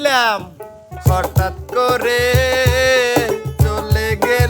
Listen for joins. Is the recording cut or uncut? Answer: cut